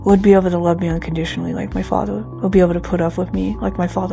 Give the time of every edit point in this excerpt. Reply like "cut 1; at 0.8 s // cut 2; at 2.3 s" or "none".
none